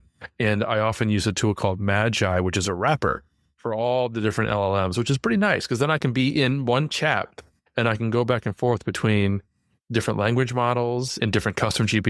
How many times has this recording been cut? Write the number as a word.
zero